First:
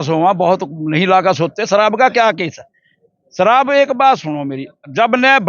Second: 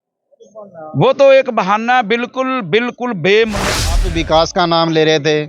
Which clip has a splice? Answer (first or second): second